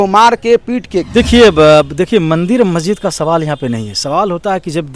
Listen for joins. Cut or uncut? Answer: cut